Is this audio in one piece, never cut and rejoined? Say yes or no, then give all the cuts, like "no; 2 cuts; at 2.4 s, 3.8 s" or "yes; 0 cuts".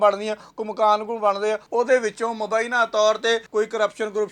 no; 2 cuts; at 1.6 s, 3.5 s